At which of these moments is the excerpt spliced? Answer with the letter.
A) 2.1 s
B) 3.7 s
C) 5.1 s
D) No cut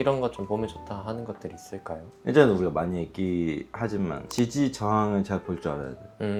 D